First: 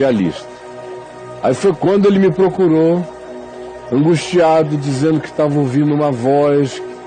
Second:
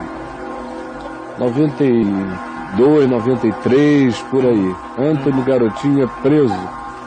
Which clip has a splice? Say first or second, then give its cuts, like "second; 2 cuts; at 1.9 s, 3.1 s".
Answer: second; 1 cut; at 5.2 s